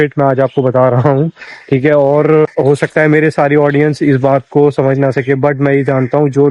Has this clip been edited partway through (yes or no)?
no